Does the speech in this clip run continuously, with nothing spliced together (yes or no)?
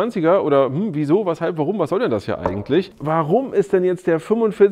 no